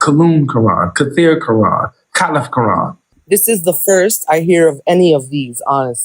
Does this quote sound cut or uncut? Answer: cut